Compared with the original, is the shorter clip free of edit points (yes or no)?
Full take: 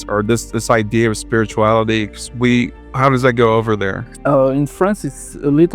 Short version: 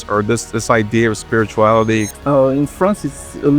no